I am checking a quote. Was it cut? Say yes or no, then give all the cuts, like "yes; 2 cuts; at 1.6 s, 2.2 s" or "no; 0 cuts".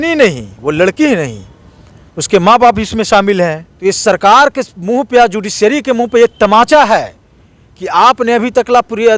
yes; 1 cut; at 3.7 s